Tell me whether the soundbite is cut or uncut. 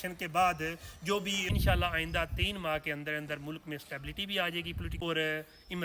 cut